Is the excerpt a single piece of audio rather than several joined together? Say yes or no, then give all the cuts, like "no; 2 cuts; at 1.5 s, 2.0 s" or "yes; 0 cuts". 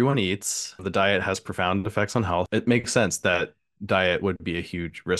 no; 2 cuts; at 0.8 s, 2.5 s